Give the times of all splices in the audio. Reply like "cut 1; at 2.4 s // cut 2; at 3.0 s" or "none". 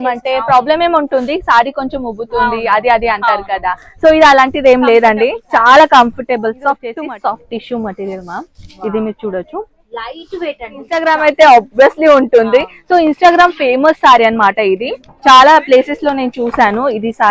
cut 1; at 6.9 s // cut 2; at 11.0 s